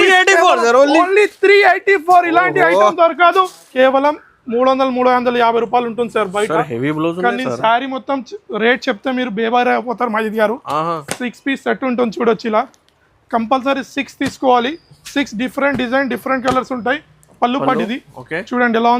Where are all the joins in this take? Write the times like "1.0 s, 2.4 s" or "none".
3.6 s, 17.3 s